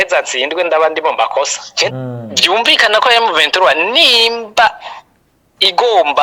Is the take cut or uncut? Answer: cut